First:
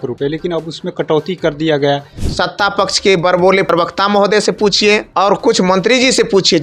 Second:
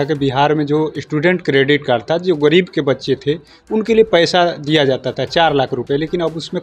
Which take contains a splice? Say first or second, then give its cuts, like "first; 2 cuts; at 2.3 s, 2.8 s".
first; 3 cuts; at 2.2 s, 3.7 s, 5.1 s